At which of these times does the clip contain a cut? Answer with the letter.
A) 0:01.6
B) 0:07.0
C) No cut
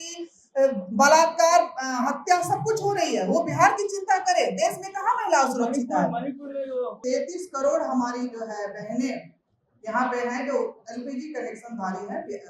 B